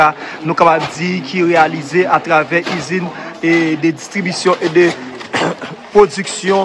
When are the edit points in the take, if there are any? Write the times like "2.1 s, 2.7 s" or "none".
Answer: none